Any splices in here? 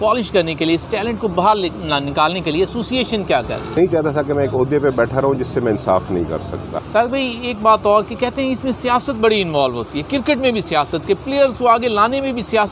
yes; 2 cuts; at 3.7 s, 6.8 s

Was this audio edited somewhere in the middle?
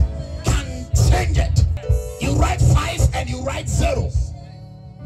yes; 1 cut; at 1.8 s

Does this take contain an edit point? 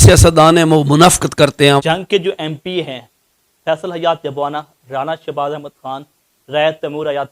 yes; 1 cut; at 1.8 s

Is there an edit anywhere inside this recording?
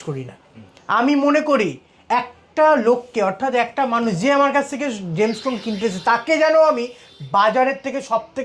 no; 0 cuts

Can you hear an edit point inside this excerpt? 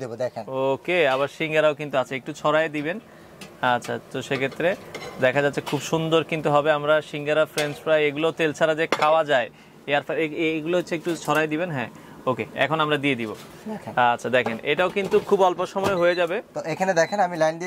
no; 0 cuts

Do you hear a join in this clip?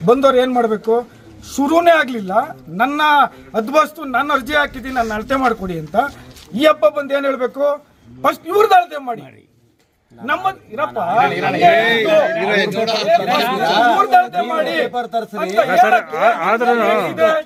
no; 0 cuts

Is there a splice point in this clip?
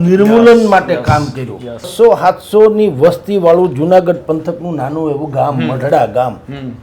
yes; 1 cut; at 1.9 s

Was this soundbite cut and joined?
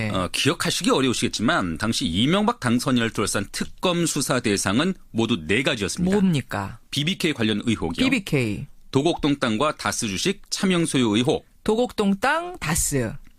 yes; 1 cut; at 7.8 s

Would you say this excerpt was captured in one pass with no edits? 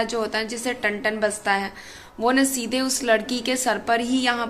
yes; 0 cuts

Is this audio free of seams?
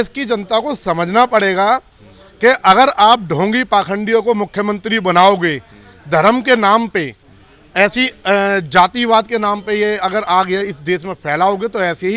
yes; 0 cuts

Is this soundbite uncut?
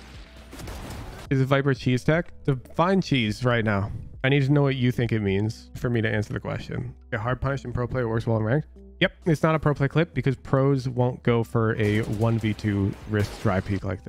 yes; 0 cuts

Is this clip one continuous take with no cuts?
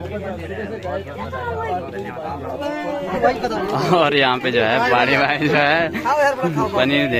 yes; 0 cuts

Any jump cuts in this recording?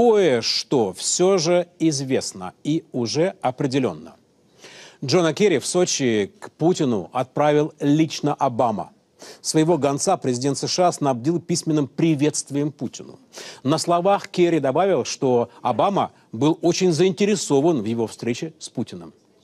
yes; 1 cut; at 5.5 s

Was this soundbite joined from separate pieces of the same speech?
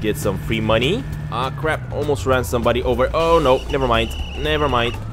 no; 0 cuts

